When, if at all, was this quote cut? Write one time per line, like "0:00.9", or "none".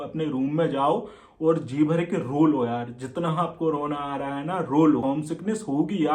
0:05.0